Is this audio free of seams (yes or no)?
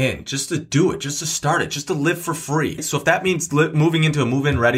no